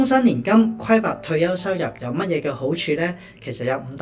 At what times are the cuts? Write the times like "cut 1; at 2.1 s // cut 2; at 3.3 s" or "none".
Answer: none